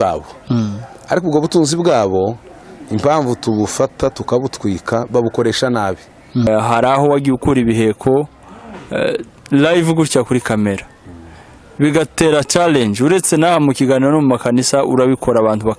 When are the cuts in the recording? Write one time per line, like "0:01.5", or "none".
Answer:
0:06.5